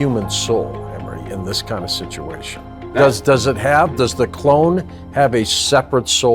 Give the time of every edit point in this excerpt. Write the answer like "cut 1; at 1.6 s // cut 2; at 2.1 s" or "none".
none